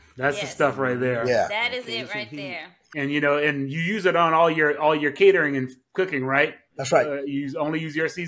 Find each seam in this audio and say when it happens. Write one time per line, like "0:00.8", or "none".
0:02.8